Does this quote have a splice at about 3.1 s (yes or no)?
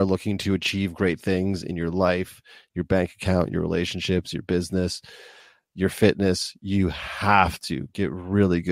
no